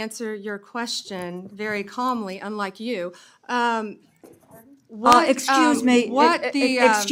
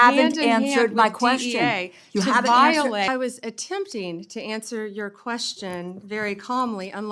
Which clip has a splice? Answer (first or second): second